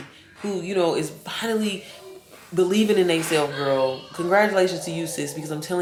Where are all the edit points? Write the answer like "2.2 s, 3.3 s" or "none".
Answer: none